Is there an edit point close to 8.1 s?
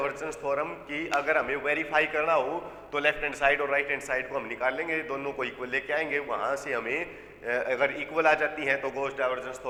no; 0 cuts

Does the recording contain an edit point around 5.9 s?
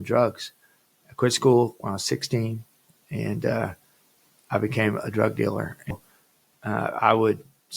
yes; 1 cut; at 5.9 s

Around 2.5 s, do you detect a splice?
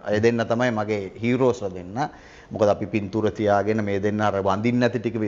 no; 0 cuts

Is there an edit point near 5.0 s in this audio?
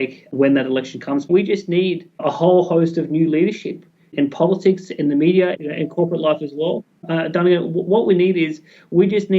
no; 1 cut; at 1.2 s

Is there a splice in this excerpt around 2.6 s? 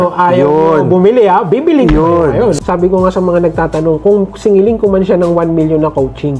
yes; 1 cut; at 2.6 s

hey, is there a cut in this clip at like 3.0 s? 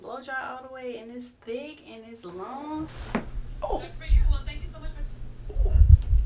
yes; 1 cut; at 3.0 s

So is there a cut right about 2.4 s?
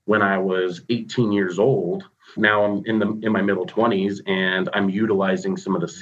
yes; 1 cut; at 2.4 s

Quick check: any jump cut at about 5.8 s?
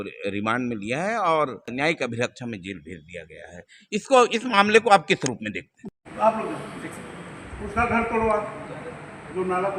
yes; 2 cuts; at 1.7 s, 5.8 s

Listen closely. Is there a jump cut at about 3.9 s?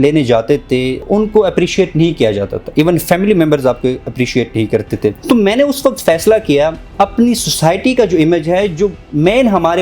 no; 3 cuts; at 1.0 s, 5.2 s, 6.8 s

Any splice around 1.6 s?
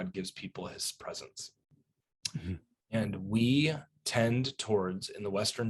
no; 0 cuts

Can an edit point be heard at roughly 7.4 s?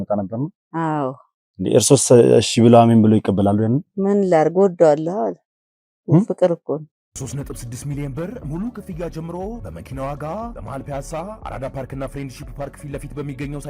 yes; 1 cut; at 7.4 s

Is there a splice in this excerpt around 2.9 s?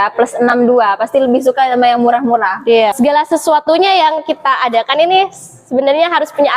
yes; 1 cut; at 2.9 s

